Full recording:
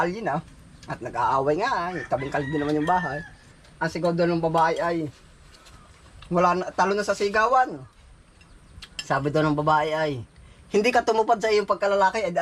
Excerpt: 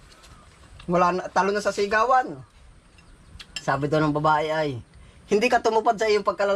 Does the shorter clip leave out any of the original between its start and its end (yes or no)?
no